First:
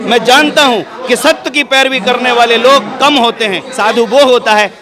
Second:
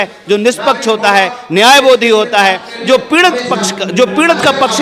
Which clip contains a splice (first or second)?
first